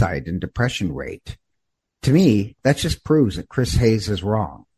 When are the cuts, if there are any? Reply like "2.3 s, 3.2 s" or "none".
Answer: none